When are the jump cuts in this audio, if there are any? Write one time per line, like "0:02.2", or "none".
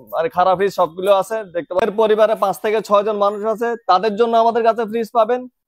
0:01.8

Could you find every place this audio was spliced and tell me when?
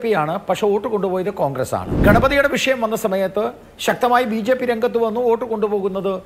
0:01.9

